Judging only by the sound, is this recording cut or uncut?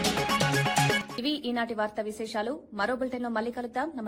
uncut